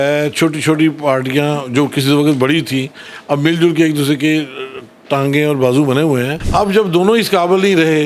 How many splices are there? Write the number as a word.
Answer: one